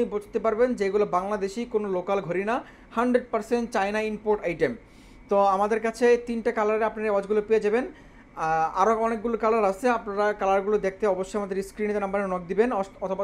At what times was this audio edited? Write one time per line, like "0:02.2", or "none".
none